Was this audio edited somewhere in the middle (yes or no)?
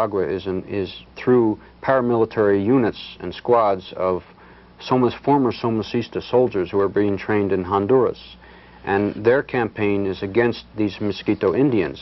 no